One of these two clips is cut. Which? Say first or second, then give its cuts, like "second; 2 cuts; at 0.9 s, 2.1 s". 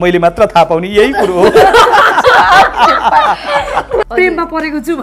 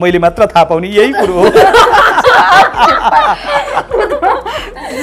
first; 1 cut; at 4.1 s